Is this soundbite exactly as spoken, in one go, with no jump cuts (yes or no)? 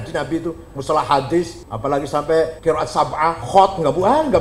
no